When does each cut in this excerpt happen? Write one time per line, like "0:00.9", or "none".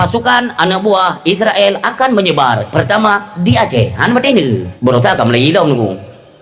0:04.7